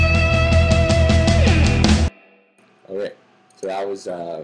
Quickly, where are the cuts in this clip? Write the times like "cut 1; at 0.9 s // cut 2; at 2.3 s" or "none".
cut 1; at 3.5 s